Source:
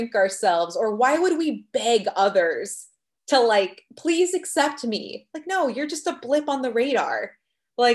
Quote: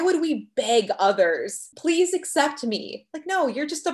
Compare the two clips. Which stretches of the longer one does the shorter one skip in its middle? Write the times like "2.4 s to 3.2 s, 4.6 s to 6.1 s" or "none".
2.8 s to 3.8 s